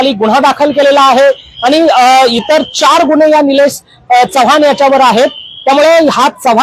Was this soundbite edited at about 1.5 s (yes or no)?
no